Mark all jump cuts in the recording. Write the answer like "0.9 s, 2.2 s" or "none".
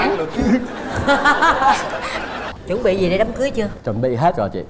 2.5 s